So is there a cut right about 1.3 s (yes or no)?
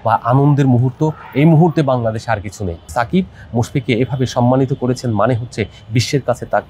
no